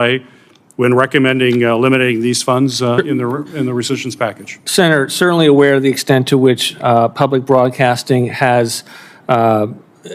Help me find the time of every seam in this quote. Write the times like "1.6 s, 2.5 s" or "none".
none